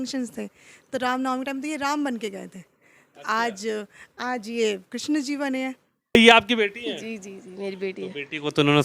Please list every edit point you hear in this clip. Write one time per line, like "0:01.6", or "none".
0:06.2